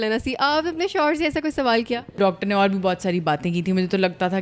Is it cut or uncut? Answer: cut